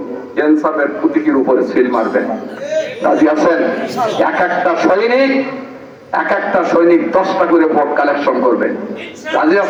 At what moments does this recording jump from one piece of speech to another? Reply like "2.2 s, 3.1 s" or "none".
none